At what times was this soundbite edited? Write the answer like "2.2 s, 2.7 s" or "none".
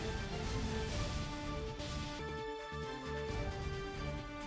none